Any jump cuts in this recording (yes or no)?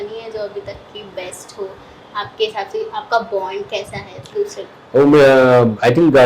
no